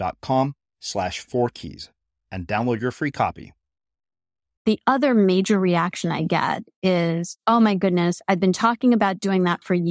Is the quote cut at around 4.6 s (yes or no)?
yes